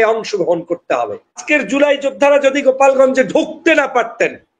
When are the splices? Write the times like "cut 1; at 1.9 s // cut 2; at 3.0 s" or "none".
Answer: cut 1; at 1.4 s

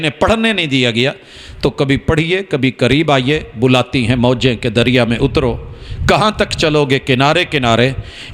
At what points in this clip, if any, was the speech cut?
none

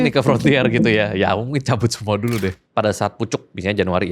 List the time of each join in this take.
cut 1; at 2.6 s

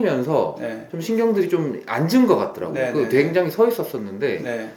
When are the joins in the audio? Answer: none

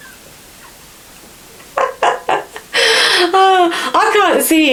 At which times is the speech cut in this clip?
none

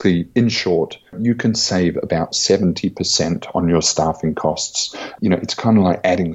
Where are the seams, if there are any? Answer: cut 1; at 1.2 s // cut 2; at 5.2 s

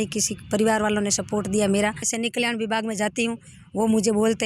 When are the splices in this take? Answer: cut 1; at 2.0 s

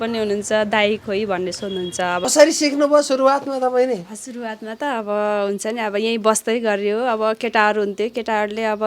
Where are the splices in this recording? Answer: cut 1; at 2.2 s

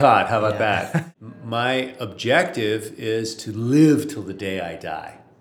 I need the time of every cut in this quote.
cut 1; at 1.1 s

